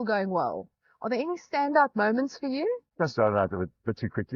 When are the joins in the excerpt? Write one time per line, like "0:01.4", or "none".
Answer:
0:02.9